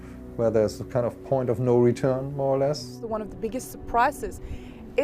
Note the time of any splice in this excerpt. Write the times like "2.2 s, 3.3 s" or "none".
3.0 s